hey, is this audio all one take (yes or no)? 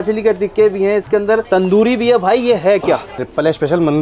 yes